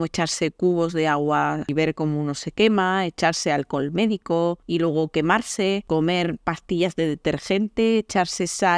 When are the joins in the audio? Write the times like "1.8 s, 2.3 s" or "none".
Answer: 1.7 s, 4.6 s, 5.8 s